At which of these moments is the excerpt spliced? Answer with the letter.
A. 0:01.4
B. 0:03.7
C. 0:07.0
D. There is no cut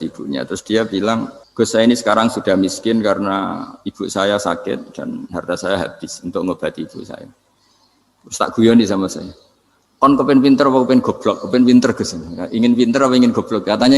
A